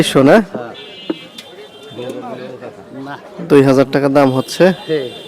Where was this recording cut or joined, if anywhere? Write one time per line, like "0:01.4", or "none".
none